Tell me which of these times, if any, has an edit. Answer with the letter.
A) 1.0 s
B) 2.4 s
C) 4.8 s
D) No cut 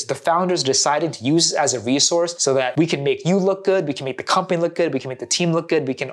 B